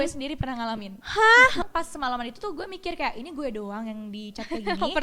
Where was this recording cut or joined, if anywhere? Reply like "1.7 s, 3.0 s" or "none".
1.6 s